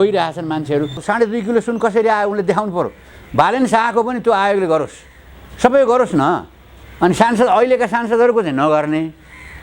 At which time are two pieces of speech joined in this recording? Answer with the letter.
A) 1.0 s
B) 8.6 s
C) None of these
A